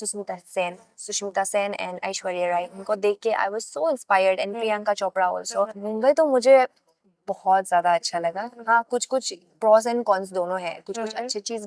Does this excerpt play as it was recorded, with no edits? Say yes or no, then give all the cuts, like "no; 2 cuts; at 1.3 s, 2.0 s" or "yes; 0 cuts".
no; 1 cut; at 5.8 s